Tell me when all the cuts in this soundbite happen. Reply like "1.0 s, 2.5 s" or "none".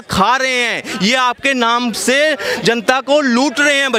none

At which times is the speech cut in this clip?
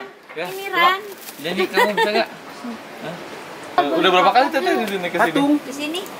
3.8 s

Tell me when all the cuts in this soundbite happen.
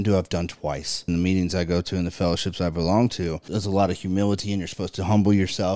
1.0 s, 3.4 s

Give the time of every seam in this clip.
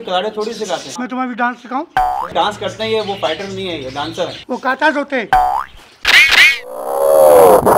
0.9 s, 2.3 s, 4.4 s

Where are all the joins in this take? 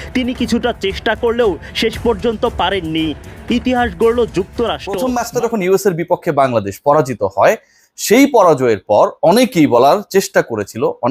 4.9 s

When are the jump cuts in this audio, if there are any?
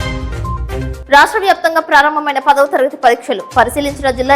0.9 s

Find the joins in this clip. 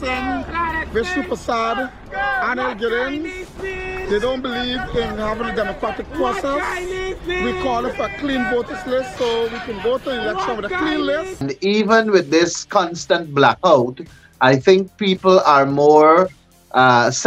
11.4 s

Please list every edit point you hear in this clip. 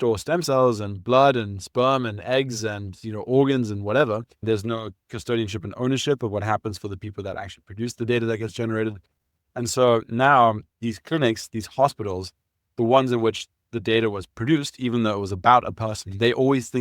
4.4 s

